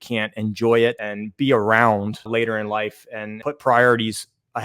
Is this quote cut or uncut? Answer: cut